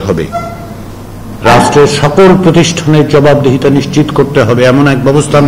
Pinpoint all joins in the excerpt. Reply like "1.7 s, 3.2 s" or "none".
none